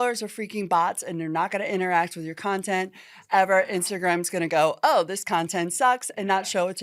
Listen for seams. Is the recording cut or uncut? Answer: uncut